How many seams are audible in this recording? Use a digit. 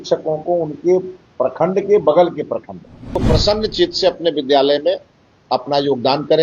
1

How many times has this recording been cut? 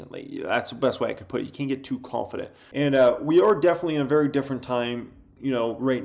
1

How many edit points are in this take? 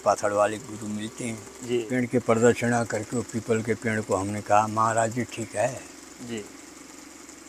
1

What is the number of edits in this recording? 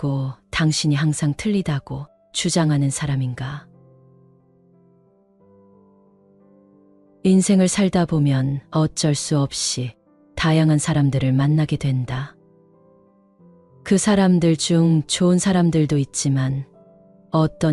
2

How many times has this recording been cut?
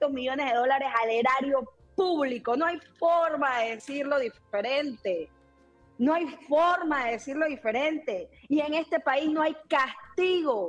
0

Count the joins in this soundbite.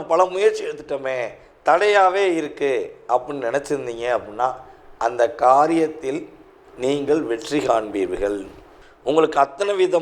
0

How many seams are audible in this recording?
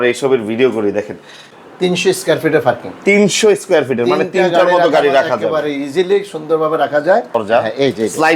2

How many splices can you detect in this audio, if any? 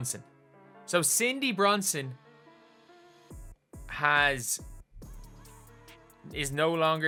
0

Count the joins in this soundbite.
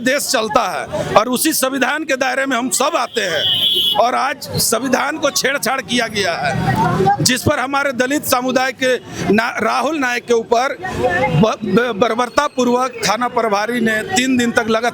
0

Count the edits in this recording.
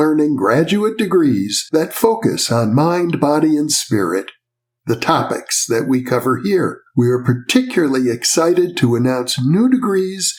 0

